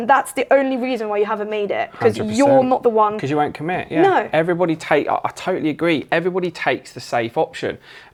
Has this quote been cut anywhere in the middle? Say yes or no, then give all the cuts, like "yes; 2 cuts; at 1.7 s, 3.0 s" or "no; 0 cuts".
no; 0 cuts